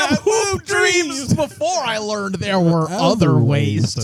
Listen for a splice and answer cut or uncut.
uncut